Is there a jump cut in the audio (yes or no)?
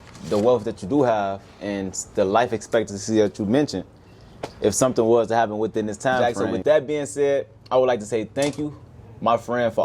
yes